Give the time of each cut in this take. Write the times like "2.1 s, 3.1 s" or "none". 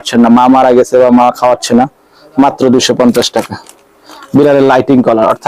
none